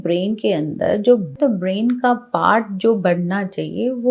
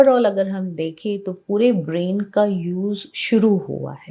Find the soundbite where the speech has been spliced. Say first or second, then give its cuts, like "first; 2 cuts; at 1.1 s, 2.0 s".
first; 1 cut; at 1.3 s